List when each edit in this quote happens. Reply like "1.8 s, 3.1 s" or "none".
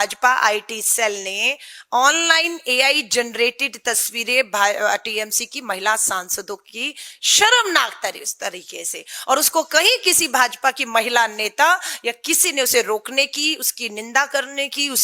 none